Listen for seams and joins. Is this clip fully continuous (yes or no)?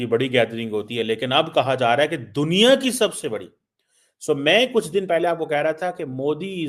yes